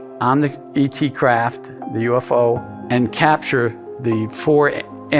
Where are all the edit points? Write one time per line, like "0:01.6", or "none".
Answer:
0:02.7
0:03.9